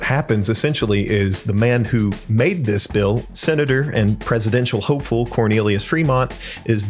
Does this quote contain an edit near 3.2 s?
yes; 1 cut; at 3.2 s

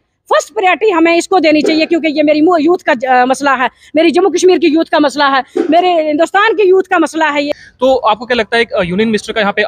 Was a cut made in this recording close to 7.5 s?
yes; 1 cut; at 7.5 s

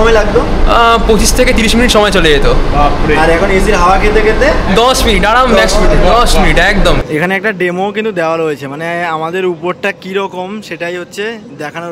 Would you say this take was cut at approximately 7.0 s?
yes; 1 cut; at 7.0 s

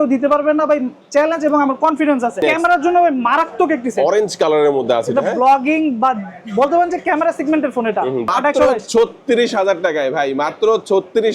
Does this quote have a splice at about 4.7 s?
no; 2 cuts; at 2.4 s, 8.3 s

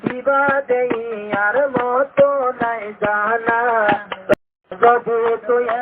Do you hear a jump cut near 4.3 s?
yes; 1 cut; at 4.3 s

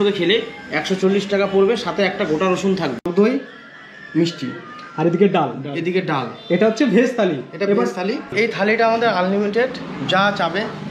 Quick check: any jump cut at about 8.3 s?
yes; 2 cuts; at 3.0 s, 8.3 s

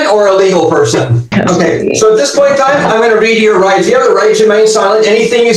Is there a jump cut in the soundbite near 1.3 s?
yes; 1 cut; at 1.3 s

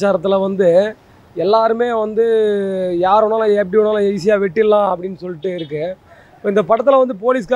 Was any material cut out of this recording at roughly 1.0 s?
no; 0 cuts

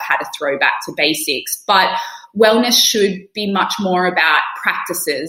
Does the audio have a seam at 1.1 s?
no; 0 cuts

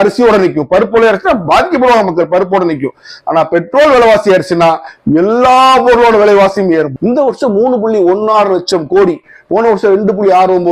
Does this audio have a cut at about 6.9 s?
yes; 1 cut; at 6.9 s

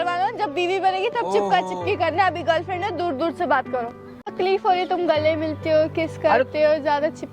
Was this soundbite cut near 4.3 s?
yes; 1 cut; at 4.3 s

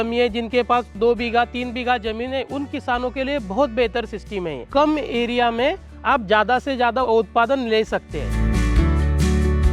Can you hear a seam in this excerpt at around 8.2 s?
yes; 4 cuts; at 1.0 s, 4.6 s, 7.0 s, 8.2 s

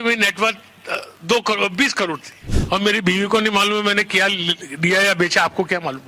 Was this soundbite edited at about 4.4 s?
no; 1 cut; at 2.5 s

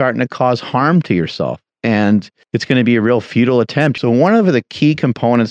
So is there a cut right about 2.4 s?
yes; 2 cuts; at 2.4 s, 3.9 s

